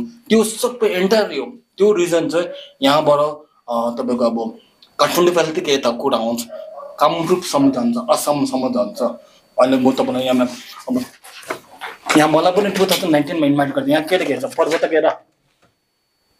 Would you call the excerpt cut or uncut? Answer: cut